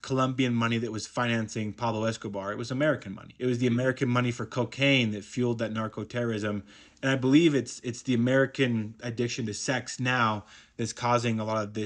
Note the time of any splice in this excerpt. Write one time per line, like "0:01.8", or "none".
none